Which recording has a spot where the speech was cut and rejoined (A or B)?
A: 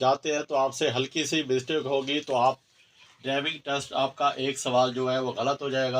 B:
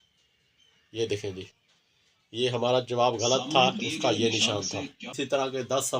B